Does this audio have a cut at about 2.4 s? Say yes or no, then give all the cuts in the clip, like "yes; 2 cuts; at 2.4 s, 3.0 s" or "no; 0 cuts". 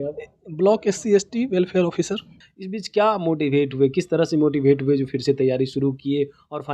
yes; 1 cut; at 2.4 s